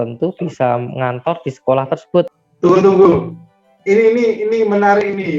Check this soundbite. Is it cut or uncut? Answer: cut